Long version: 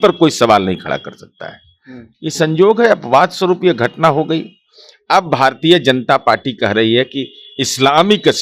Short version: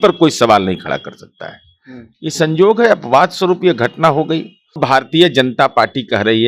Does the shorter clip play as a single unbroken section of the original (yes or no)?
no